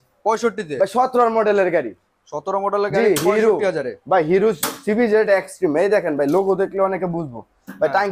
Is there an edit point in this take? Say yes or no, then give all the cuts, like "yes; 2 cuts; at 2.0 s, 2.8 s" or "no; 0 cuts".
no; 0 cuts